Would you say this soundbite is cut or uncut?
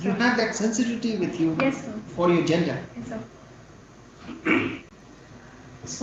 uncut